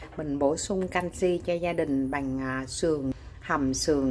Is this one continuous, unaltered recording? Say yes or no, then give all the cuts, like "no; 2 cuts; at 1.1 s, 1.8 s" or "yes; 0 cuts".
no; 1 cut; at 3.1 s